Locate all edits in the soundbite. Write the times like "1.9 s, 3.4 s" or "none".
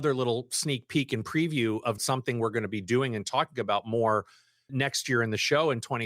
2.0 s